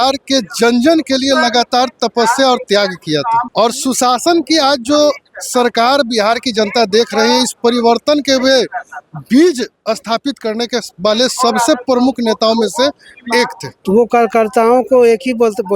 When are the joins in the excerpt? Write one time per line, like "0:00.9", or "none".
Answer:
0:03.5
0:13.7